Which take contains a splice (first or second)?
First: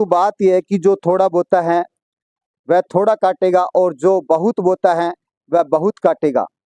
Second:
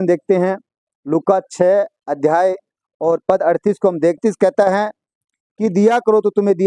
second